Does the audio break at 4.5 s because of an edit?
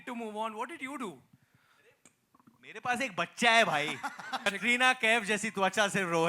yes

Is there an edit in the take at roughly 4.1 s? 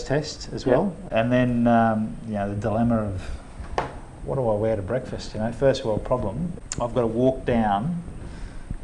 no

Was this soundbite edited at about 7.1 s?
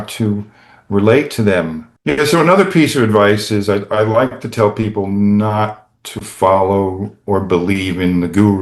no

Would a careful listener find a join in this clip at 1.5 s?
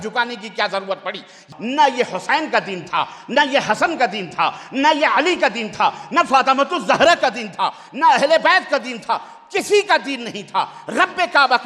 yes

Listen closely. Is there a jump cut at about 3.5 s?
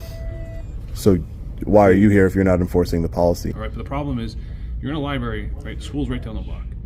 yes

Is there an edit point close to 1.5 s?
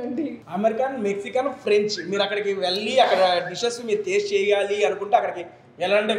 no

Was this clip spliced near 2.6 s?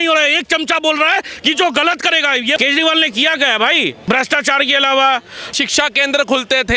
yes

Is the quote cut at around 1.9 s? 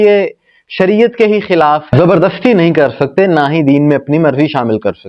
yes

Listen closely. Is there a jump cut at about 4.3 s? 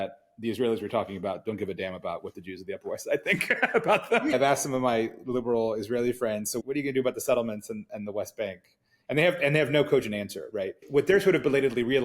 yes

